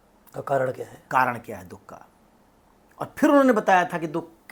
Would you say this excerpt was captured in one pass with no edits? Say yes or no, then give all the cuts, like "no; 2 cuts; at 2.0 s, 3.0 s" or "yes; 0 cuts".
yes; 0 cuts